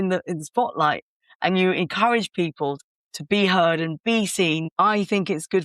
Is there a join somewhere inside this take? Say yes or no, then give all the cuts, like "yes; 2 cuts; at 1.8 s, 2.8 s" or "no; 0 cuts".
yes; 2 cuts; at 2.8 s, 4.7 s